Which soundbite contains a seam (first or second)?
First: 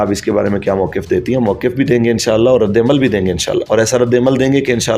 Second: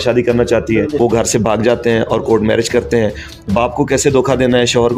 second